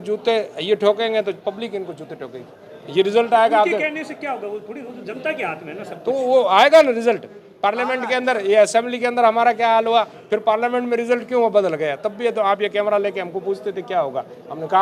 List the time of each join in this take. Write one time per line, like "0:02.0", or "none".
none